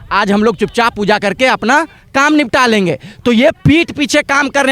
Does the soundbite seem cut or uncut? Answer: uncut